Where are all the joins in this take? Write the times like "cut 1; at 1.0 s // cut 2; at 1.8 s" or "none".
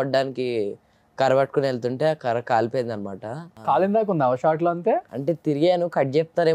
cut 1; at 3.5 s // cut 2; at 5.1 s